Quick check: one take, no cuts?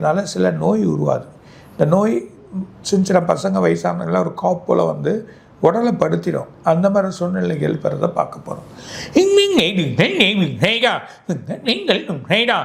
yes; 0 cuts

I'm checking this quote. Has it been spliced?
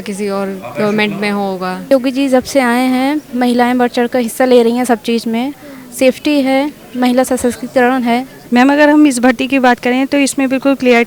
yes; 2 cuts; at 1.9 s, 8.3 s

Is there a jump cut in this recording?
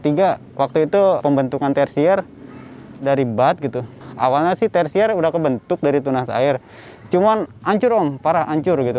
no; 0 cuts

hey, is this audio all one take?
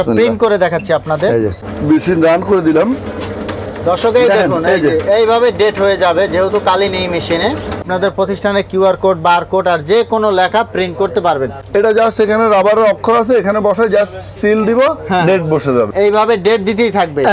no; 4 cuts; at 1.7 s, 7.9 s, 11.6 s, 15.9 s

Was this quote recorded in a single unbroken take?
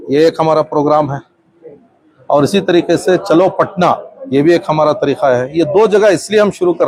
yes; 0 cuts

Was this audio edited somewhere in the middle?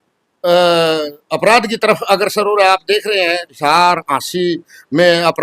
yes; 1 cut; at 3.5 s

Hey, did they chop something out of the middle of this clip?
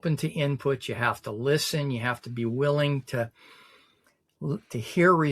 no; 0 cuts

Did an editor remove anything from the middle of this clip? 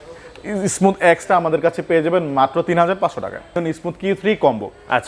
yes; 1 cut; at 3.6 s

